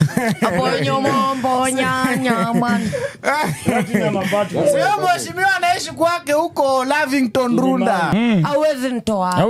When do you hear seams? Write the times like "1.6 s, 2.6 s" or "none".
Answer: 8.1 s